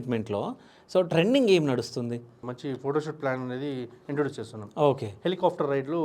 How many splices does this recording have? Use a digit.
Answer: 1